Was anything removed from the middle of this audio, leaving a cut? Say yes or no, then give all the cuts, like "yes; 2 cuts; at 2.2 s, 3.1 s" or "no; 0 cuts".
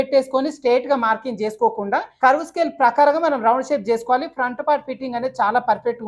yes; 1 cut; at 2.1 s